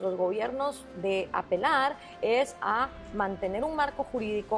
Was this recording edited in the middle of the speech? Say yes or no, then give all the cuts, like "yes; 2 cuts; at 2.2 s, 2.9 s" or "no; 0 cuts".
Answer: no; 0 cuts